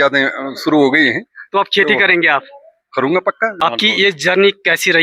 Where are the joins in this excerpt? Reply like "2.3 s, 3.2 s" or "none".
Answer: 3.6 s